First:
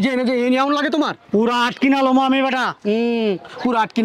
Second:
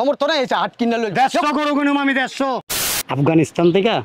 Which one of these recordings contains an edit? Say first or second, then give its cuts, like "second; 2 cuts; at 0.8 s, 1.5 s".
second; 1 cut; at 2.6 s